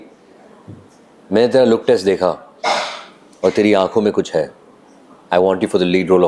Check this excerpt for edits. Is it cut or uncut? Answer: uncut